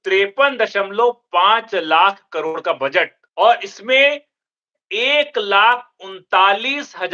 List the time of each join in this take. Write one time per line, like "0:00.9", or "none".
0:03.2